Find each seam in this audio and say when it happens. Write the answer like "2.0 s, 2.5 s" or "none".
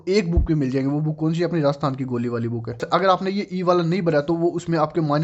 2.8 s